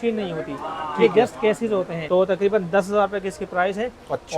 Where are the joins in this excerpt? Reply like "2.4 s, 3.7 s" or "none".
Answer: 2.0 s